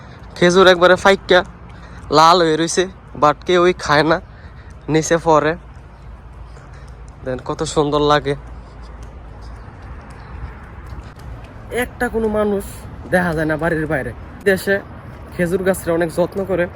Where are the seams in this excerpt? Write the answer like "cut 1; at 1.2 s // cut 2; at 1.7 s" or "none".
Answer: cut 1; at 14.4 s